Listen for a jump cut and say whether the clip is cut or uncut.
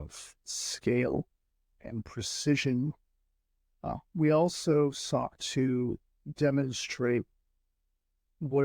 uncut